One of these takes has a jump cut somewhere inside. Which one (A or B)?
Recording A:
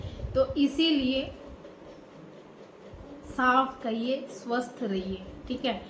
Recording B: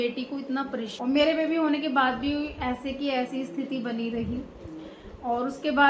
B